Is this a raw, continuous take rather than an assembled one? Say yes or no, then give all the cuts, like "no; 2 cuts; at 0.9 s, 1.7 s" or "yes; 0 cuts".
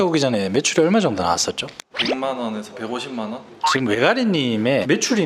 no; 1 cut; at 3.5 s